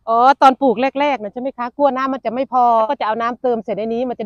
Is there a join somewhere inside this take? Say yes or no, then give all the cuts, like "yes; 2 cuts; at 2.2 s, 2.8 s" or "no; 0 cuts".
yes; 1 cut; at 2.9 s